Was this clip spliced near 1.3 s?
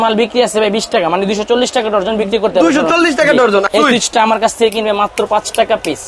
no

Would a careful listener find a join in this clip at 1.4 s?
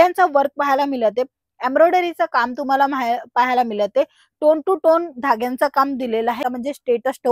no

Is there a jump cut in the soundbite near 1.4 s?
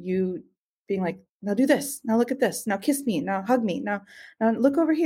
no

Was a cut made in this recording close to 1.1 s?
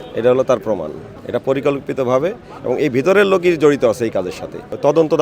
yes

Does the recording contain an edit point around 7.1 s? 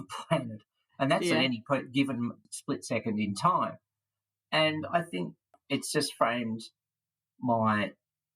no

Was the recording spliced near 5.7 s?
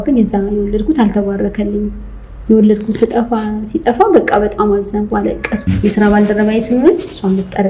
yes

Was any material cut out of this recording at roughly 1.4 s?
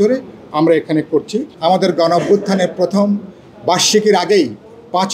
yes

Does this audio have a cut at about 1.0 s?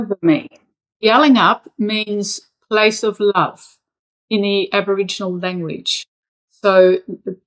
yes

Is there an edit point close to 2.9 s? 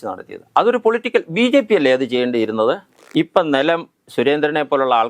yes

